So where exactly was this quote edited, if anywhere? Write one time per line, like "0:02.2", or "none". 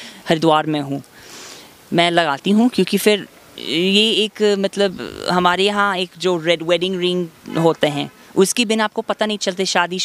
none